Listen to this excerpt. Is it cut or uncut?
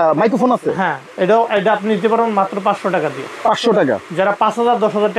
uncut